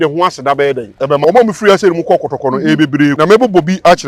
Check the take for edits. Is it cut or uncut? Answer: cut